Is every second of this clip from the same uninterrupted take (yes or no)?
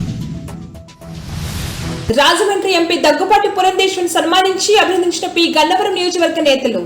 no